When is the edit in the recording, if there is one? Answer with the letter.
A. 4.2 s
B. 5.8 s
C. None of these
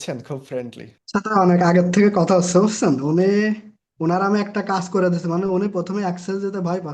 C